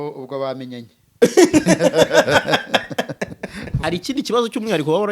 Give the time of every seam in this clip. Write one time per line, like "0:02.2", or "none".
0:03.8